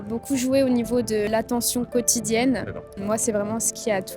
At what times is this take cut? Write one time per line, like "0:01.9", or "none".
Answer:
0:01.3
0:02.9